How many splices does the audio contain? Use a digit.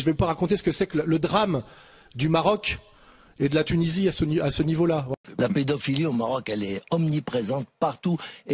1